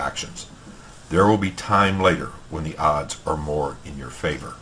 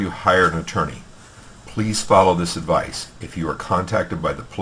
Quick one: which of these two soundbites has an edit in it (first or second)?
second